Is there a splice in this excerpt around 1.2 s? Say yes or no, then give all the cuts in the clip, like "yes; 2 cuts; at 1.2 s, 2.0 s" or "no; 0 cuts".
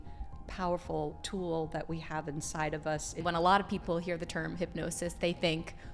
yes; 2 cuts; at 1.2 s, 3.2 s